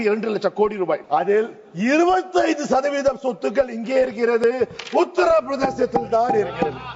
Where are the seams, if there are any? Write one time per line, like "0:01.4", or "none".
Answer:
0:01.0